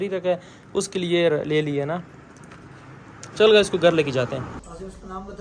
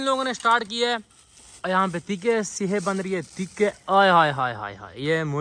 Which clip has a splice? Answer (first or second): first